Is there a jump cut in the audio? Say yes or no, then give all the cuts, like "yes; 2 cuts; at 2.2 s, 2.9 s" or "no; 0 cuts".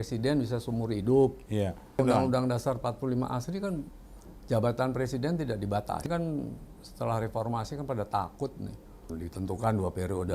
yes; 3 cuts; at 1.9 s, 6.1 s, 9.0 s